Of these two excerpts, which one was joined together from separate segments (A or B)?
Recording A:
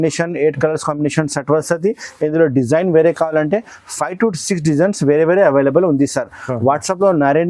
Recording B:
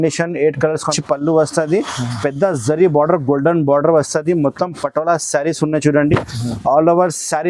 B